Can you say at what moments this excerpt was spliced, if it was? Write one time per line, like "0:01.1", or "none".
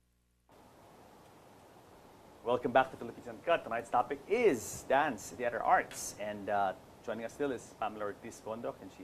0:02.8